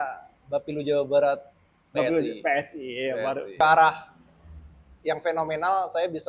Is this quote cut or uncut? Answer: cut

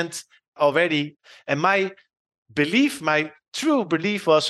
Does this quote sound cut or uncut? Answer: cut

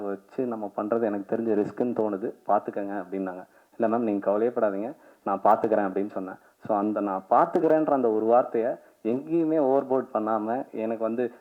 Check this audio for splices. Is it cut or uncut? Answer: uncut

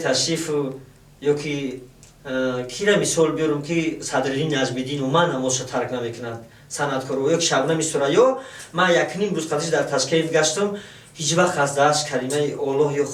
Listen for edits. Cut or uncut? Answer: uncut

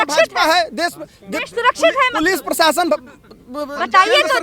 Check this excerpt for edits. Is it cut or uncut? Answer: uncut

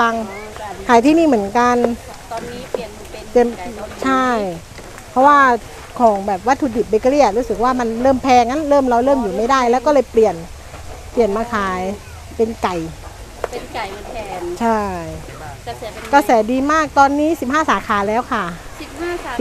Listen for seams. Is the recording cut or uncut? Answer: uncut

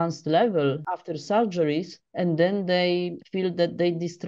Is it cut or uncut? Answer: cut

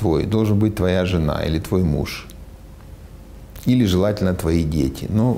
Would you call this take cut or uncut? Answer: uncut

